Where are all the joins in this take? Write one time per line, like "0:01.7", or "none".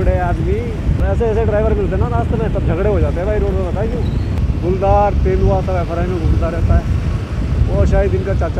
0:01.0
0:04.3